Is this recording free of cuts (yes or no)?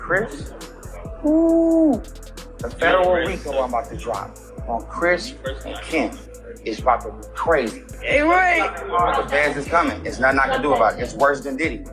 no